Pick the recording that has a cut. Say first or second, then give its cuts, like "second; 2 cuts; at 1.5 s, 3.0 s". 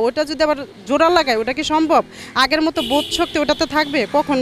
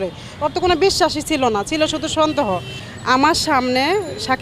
second; 1 cut; at 2.8 s